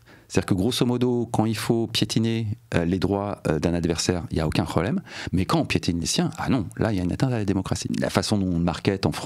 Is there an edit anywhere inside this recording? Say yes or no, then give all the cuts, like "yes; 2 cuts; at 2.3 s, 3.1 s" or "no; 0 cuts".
yes; 1 cut; at 7.9 s